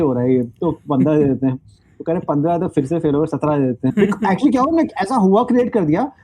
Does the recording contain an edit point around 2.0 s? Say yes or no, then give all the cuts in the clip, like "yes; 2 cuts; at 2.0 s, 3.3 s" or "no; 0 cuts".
no; 1 cut; at 3.9 s